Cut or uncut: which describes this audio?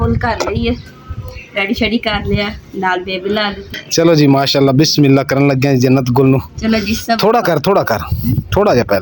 cut